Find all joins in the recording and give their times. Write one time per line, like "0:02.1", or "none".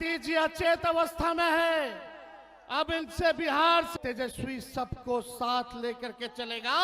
0:03.9